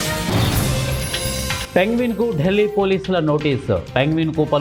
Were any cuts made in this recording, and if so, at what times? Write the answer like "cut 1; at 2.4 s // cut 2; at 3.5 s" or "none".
none